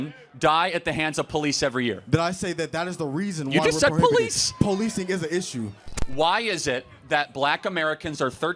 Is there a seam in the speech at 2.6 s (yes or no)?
no